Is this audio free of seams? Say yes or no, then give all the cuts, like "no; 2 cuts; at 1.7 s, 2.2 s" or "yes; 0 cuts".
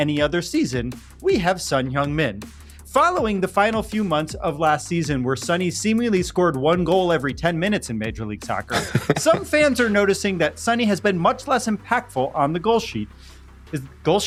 yes; 0 cuts